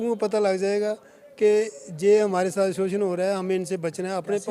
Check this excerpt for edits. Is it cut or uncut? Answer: uncut